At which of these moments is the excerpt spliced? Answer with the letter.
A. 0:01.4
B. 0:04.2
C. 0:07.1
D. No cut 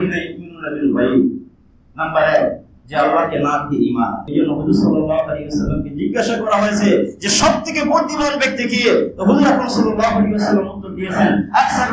B